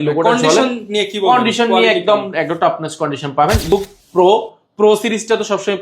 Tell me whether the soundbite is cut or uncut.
cut